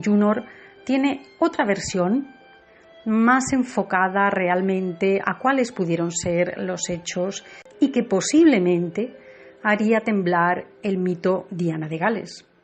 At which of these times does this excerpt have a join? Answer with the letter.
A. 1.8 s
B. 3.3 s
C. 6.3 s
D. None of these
B